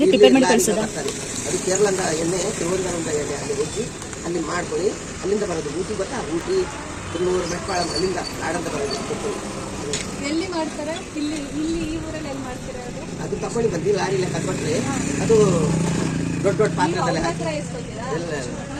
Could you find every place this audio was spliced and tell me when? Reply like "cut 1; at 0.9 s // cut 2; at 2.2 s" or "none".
none